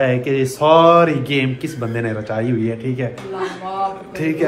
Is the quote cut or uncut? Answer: uncut